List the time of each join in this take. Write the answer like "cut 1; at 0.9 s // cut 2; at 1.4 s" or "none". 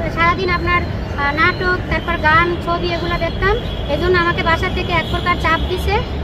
none